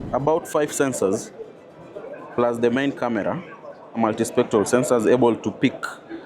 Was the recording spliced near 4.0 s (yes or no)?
yes